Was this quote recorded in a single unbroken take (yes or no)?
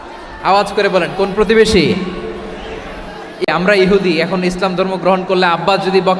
no